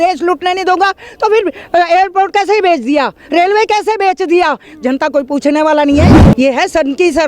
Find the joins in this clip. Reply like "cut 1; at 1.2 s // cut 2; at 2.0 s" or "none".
cut 1; at 6.1 s